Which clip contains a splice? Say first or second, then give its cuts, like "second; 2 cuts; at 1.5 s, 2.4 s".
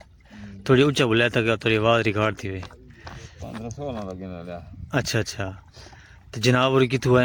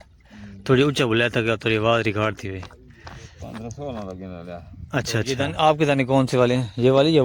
second; 1 cut; at 5.3 s